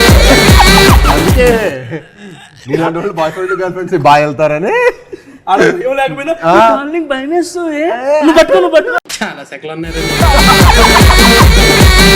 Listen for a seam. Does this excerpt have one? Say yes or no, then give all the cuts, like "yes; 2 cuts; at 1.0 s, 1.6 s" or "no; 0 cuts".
yes; 1 cut; at 9.1 s